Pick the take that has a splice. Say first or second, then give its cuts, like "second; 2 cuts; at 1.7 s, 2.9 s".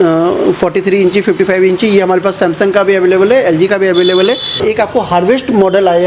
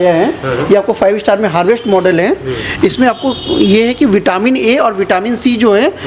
first; 1 cut; at 4.6 s